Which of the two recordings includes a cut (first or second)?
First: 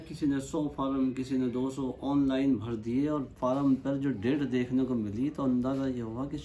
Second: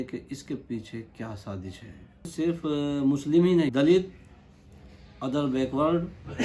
second